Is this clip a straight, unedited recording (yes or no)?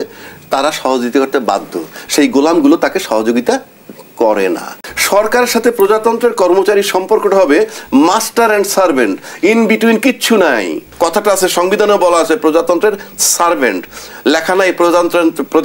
no